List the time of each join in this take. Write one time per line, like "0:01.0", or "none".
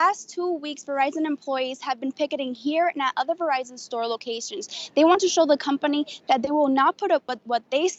none